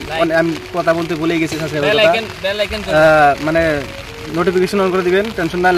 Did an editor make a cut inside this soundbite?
no; 0 cuts

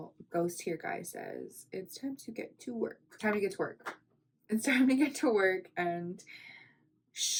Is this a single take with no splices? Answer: yes; 0 cuts

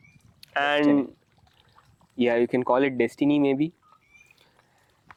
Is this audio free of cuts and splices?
yes; 0 cuts

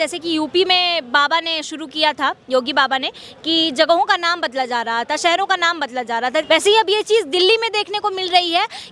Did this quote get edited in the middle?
yes; 1 cut; at 6.5 s

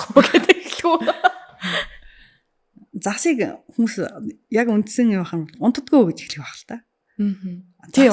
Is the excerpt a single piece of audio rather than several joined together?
yes; 0 cuts

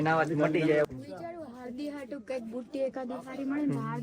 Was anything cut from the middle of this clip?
yes; 1 cut; at 0.9 s

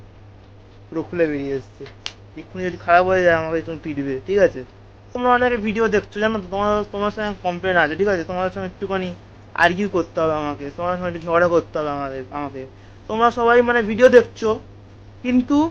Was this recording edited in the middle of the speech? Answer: yes; 1 cut; at 5.2 s

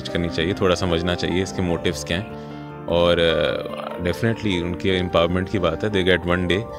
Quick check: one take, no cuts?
yes; 0 cuts

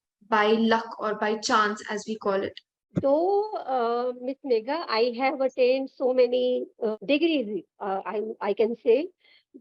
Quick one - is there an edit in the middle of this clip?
yes; 2 cuts; at 3.0 s, 6.9 s

